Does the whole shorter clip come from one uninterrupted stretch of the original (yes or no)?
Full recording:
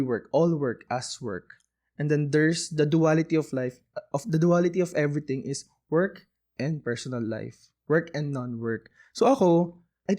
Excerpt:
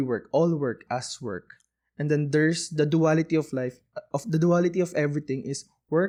yes